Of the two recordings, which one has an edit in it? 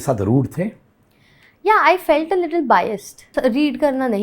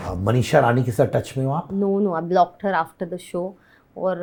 first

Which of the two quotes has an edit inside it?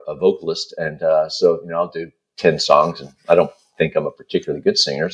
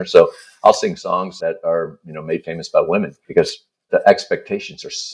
second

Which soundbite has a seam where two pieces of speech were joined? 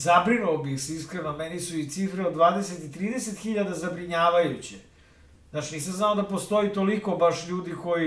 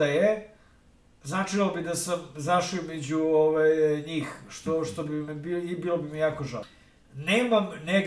second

